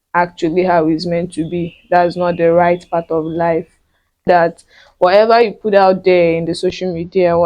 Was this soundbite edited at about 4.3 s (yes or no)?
yes